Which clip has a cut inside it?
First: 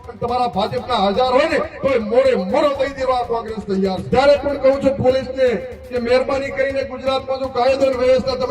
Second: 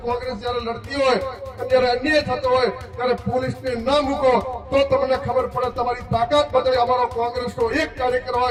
first; 1 cut; at 4.0 s

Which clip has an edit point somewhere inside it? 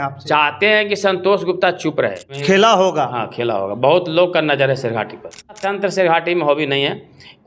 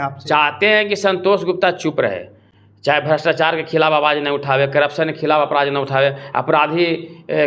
first; 2 cuts; at 2.4 s, 5.6 s

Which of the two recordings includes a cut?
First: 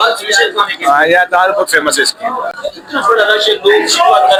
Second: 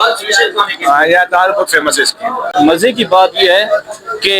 second; 1 cut; at 2.5 s

